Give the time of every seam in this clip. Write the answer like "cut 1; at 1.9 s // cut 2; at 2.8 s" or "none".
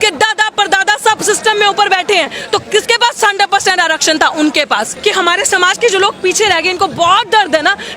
cut 1; at 4.9 s